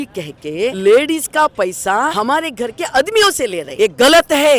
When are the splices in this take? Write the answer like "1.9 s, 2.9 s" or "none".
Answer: 0.8 s, 2.1 s, 3.6 s